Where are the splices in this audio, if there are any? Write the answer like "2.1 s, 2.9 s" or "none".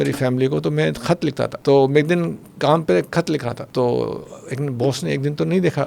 1.6 s, 3.6 s